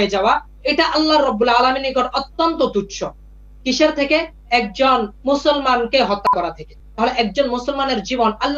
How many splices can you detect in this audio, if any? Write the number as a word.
zero